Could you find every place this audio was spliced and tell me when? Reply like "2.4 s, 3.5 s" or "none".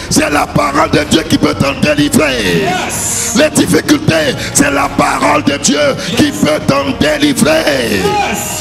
none